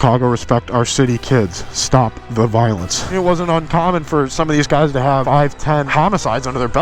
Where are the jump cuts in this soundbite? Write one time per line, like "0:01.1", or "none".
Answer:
0:03.1
0:05.6